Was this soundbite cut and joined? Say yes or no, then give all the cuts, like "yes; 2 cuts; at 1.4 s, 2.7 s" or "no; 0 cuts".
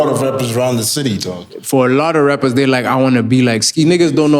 no; 0 cuts